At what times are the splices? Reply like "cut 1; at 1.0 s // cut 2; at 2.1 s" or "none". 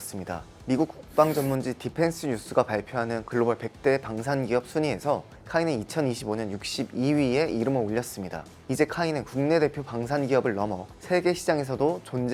none